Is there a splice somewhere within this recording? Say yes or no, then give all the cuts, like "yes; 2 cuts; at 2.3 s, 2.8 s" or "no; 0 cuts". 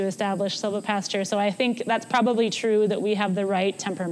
no; 0 cuts